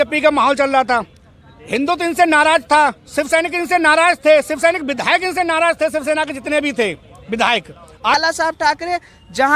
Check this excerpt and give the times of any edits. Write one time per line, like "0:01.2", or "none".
0:08.1